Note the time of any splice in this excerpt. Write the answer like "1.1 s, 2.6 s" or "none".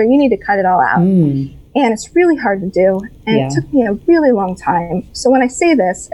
none